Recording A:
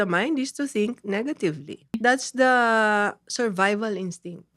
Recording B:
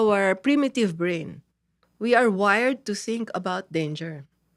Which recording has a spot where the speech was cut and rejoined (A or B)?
A